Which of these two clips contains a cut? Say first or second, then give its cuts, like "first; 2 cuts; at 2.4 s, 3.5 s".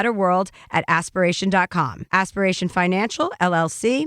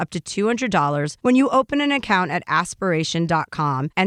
first; 1 cut; at 2.0 s